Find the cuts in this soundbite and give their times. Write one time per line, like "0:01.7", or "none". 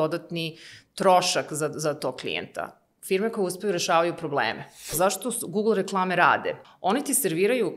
0:05.0
0:06.7